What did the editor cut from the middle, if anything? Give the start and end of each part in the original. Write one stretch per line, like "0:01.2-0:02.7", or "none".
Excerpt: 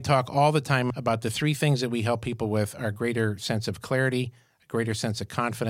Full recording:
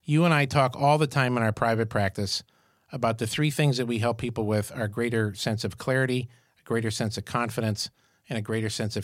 0:01.4-0:02.9